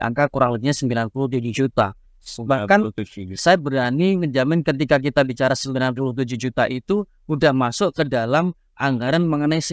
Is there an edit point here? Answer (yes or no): no